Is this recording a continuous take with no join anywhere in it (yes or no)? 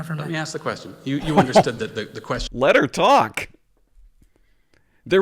no